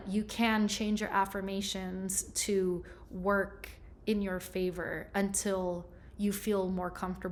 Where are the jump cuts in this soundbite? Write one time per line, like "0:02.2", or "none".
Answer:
none